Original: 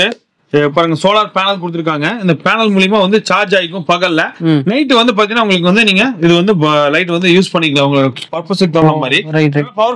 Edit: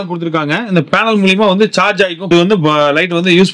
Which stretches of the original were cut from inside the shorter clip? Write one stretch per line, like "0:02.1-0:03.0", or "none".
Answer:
0:03.8-0:06.3